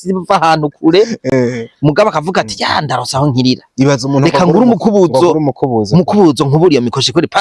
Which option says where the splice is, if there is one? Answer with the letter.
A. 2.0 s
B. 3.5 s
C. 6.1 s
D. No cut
D